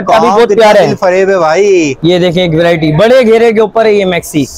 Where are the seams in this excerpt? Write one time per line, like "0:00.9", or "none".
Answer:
0:01.9